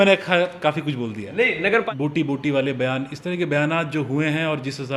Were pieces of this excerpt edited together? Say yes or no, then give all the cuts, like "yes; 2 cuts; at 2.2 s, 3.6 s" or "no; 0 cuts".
yes; 1 cut; at 1.8 s